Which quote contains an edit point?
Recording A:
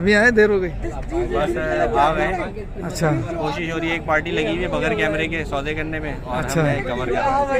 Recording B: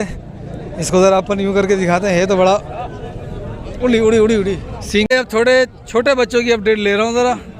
B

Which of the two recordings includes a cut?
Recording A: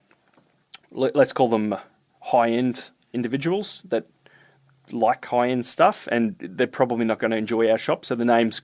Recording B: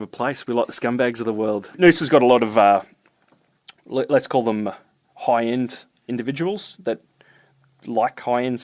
B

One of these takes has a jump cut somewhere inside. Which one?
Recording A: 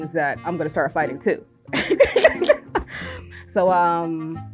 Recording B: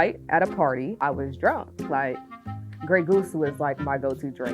B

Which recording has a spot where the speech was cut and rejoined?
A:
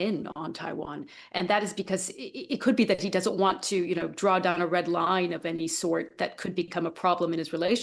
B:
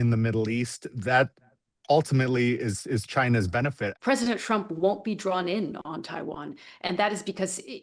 B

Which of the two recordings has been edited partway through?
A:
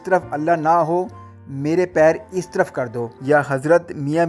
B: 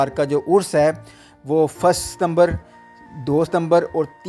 A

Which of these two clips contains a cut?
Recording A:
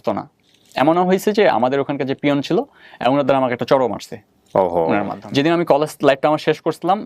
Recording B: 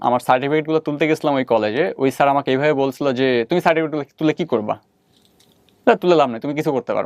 A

